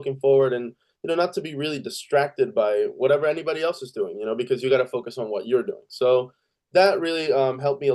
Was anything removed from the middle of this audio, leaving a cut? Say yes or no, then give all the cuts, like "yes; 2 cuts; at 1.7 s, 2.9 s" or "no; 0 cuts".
no; 0 cuts